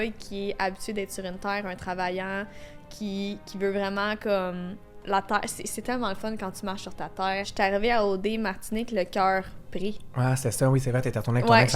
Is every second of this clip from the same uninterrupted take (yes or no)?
no